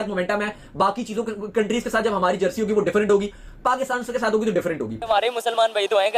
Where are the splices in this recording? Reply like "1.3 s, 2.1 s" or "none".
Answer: 5.0 s